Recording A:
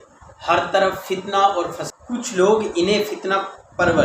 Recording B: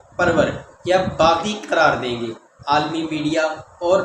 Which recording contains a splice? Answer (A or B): A